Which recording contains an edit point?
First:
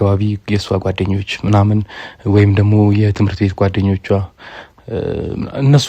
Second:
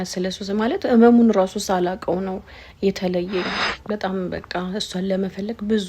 second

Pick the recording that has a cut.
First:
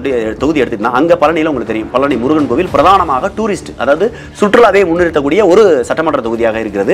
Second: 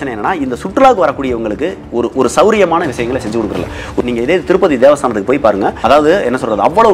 second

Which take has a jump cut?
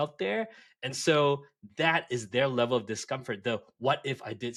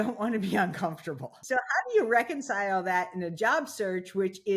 second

